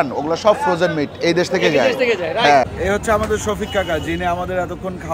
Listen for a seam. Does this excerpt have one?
yes; 1 cut; at 2.7 s

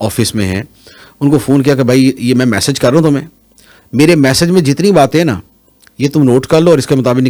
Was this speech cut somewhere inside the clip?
no; 0 cuts

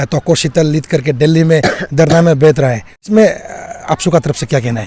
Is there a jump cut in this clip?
yes; 1 cut; at 2.9 s

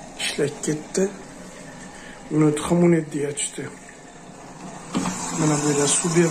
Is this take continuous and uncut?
yes; 0 cuts

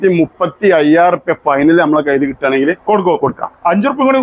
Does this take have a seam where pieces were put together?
no; 0 cuts

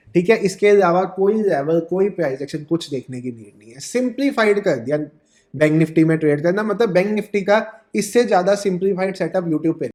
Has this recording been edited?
no; 0 cuts

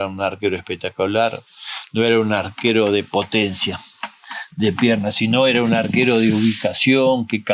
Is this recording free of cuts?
yes; 0 cuts

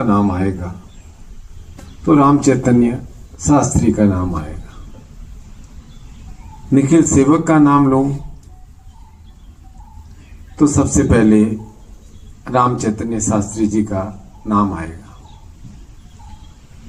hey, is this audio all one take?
yes; 0 cuts

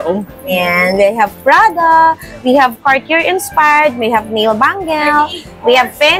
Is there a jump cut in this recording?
no; 0 cuts

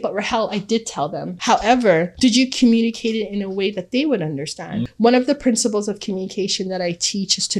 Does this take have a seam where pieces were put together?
yes; 2 cuts; at 1.3 s, 4.9 s

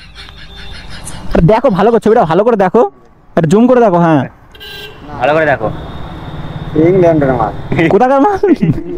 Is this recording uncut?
yes; 0 cuts

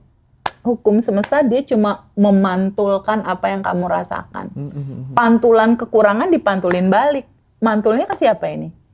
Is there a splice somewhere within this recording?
no; 0 cuts

